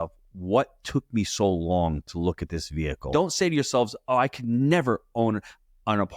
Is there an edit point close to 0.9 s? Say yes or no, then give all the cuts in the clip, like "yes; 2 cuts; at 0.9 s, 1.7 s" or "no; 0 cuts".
no; 1 cut; at 3.0 s